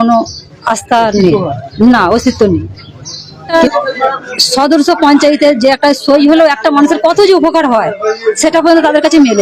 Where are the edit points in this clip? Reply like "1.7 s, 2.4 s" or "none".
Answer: 3.5 s